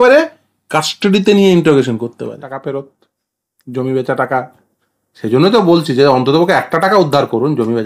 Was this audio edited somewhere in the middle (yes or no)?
yes